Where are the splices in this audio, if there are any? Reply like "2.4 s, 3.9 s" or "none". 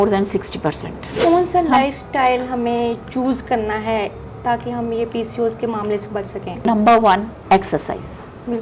1.2 s, 6.6 s, 7.3 s